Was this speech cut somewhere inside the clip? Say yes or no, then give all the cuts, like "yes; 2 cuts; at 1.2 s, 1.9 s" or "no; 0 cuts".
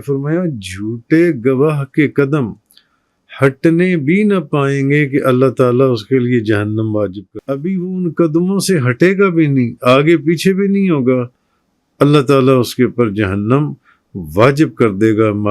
yes; 1 cut; at 7.3 s